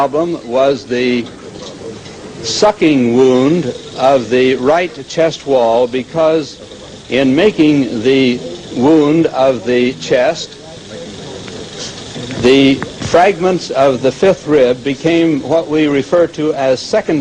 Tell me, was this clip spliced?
no; 0 cuts

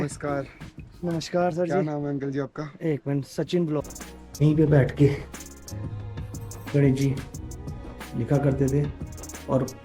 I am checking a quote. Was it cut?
yes; 1 cut; at 3.8 s

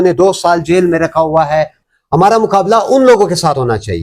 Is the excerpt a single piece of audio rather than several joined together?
no; 1 cut; at 1.8 s

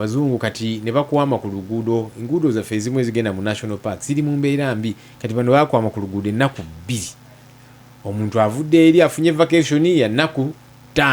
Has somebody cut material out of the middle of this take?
no; 0 cuts

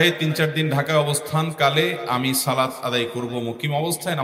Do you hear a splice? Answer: no; 0 cuts

